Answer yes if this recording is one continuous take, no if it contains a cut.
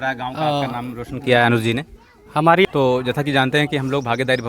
no